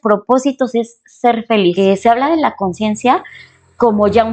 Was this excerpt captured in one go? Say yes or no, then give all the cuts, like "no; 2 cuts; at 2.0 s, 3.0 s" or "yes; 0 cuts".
no; 1 cut; at 1.7 s